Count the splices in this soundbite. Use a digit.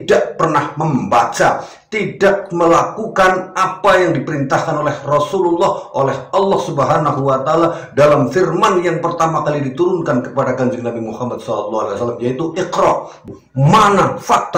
1